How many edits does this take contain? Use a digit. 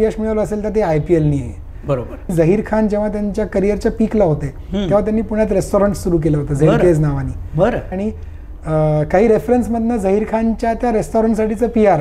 2